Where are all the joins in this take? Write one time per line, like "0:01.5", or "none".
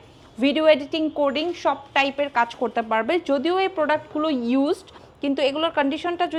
none